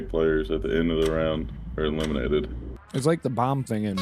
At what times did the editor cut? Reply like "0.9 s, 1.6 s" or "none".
2.7 s